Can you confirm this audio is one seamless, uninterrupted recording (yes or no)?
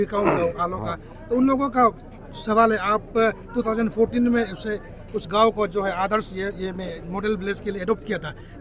yes